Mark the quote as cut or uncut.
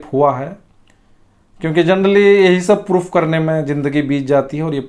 uncut